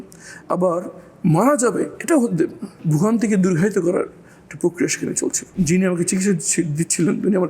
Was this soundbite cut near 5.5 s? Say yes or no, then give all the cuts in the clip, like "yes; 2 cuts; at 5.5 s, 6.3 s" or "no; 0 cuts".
yes; 2 cuts; at 2.7 s, 5.5 s